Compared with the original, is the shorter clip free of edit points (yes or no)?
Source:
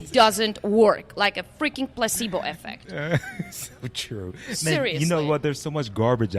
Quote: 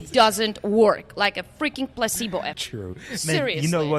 no